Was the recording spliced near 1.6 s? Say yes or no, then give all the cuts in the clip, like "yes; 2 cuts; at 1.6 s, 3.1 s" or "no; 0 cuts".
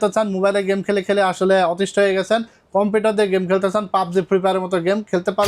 no; 0 cuts